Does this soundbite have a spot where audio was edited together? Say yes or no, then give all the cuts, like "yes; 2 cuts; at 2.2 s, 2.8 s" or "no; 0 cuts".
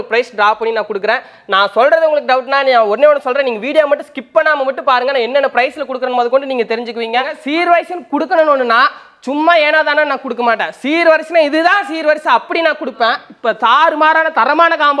yes; 2 cuts; at 7.4 s, 13.3 s